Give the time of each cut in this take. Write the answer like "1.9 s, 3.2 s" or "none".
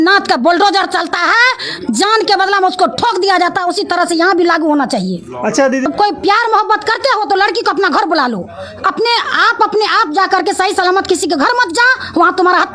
5.9 s